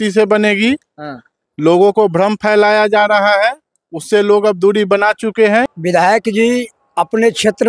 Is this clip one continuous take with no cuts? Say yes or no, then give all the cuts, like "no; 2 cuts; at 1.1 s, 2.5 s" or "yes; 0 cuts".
no; 1 cut; at 5.8 s